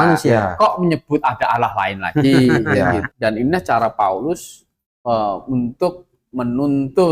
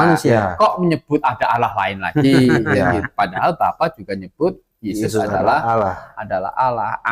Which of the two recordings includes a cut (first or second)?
first